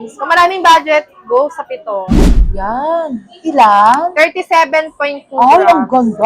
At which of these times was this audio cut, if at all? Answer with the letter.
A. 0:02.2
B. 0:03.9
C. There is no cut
A